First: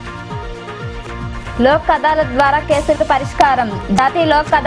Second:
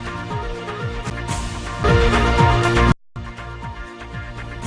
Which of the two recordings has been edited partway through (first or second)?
second